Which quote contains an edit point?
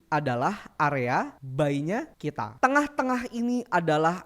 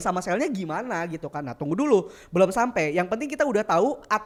first; 2 cuts; at 1.4 s, 2.4 s

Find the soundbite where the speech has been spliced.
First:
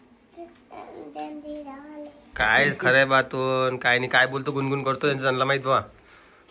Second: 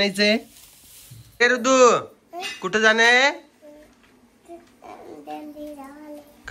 second; 1 cut; at 1.4 s

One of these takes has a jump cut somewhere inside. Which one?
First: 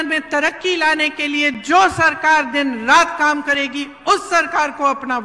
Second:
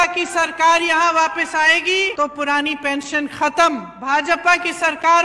second; 2 cuts; at 2.1 s, 3.9 s

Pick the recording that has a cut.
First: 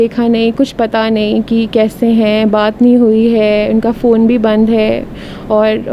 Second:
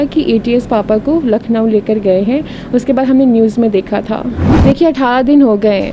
second; 1 cut; at 4.5 s

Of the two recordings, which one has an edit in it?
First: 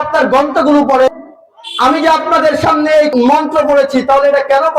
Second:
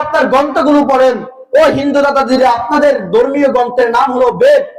first; 2 cuts; at 1.1 s, 3.1 s

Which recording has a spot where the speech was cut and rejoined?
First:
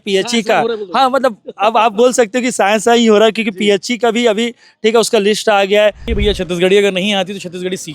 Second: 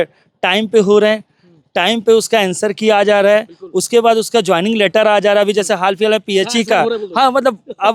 first; 1 cut; at 6.1 s

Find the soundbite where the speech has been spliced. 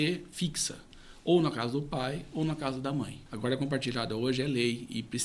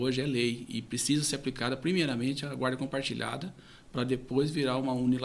first; 1 cut; at 3.2 s

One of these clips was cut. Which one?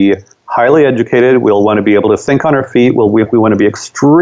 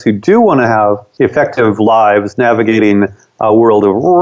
second; 1 cut; at 1.1 s

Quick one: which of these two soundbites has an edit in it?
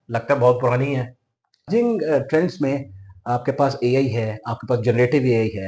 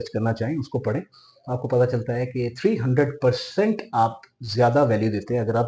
first; 1 cut; at 1.7 s

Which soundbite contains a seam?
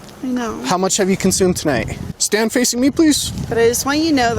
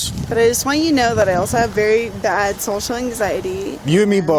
first; 1 cut; at 2.1 s

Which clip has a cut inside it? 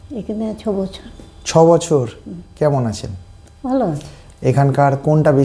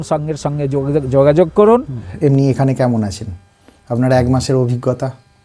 second; 1 cut; at 2.1 s

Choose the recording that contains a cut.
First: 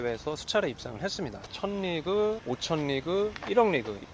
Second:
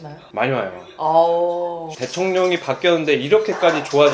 first; 1 cut; at 1.5 s

